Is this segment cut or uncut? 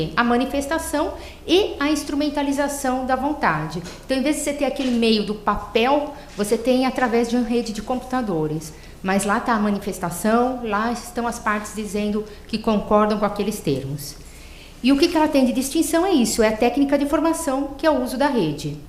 cut